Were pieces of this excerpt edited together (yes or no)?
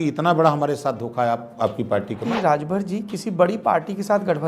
yes